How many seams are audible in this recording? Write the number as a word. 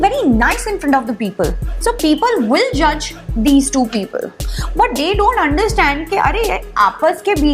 one